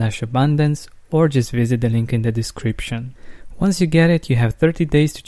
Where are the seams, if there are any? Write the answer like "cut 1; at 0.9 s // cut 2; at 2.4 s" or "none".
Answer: none

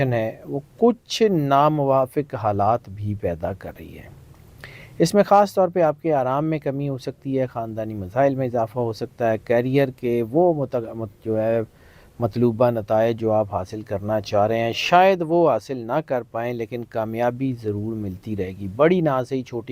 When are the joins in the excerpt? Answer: none

